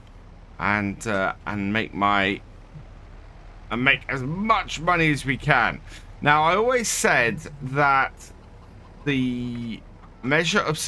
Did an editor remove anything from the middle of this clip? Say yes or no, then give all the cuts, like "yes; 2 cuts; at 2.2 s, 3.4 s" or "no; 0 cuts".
no; 0 cuts